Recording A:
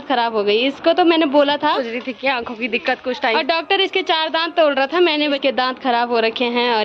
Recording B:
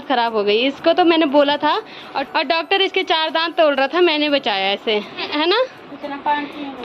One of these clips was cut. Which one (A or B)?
A